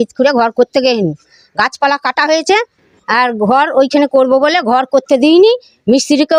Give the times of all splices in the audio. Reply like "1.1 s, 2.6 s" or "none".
none